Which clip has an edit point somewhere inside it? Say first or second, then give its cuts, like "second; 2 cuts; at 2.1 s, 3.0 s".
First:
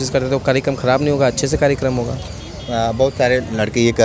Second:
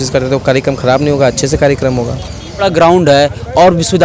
second; 1 cut; at 2.6 s